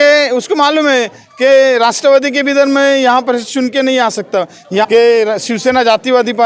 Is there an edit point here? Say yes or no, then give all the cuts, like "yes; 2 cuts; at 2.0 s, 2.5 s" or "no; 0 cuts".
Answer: yes; 1 cut; at 4.8 s